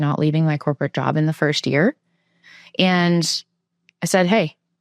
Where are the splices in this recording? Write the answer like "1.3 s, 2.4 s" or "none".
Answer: none